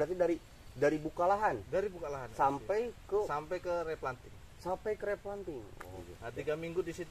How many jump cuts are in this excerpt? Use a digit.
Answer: 1